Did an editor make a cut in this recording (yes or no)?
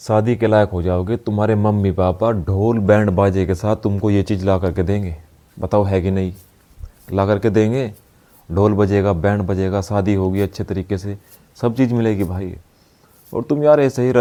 no